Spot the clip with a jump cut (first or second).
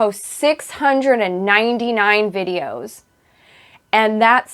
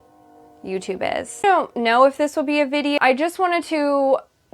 second